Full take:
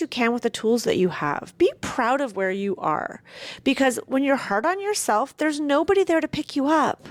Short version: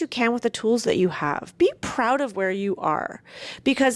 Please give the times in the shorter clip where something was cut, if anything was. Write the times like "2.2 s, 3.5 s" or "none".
none